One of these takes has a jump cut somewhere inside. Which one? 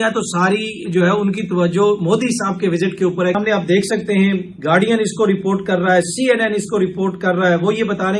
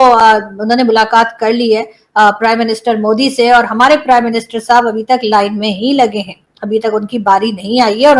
first; 1 cut; at 3.4 s

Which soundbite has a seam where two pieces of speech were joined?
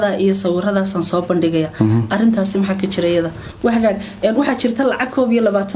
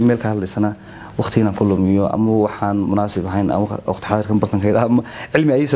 first; 1 cut; at 3.4 s

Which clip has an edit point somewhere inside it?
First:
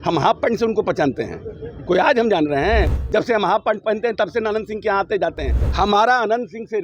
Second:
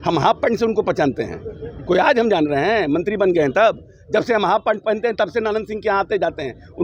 first; 2 cuts; at 2.9 s, 5.6 s

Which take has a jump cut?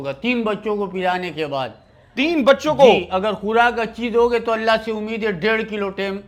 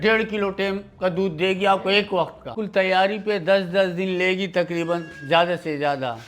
second; 1 cut; at 2.6 s

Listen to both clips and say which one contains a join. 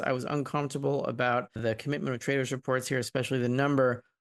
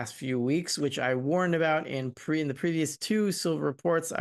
first; 1 cut; at 1.6 s

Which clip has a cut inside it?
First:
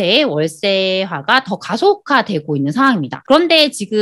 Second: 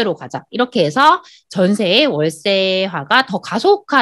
first; 1 cut; at 3.1 s

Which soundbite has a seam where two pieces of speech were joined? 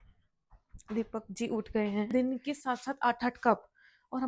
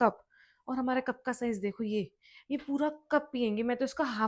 first; 1 cut; at 2.1 s

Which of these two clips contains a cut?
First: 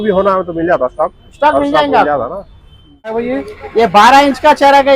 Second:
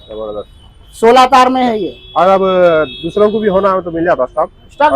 first; 1 cut; at 3.2 s

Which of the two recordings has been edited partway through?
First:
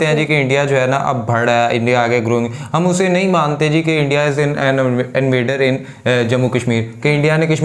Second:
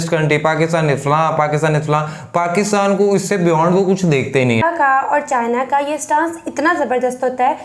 second; 1 cut; at 4.6 s

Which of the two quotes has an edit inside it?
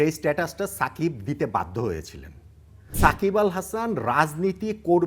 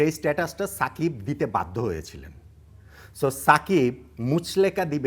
first; 1 cut; at 2.9 s

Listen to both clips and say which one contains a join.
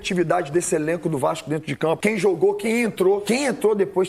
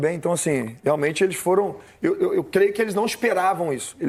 first; 2 cuts; at 2.0 s, 3.2 s

